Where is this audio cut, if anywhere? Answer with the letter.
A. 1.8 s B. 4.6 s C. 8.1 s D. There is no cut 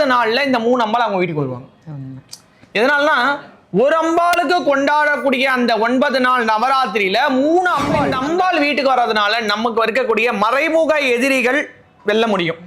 C